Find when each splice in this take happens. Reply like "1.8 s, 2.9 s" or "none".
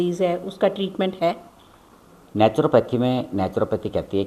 none